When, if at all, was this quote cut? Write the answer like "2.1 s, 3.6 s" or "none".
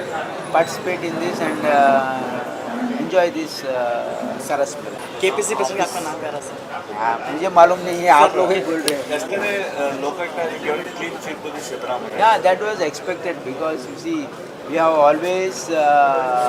none